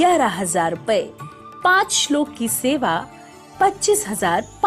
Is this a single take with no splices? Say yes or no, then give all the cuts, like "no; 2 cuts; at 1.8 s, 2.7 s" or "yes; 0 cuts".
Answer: yes; 0 cuts